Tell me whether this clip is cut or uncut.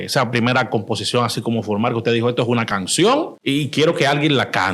cut